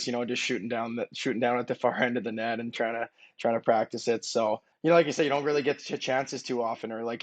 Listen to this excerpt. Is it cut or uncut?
cut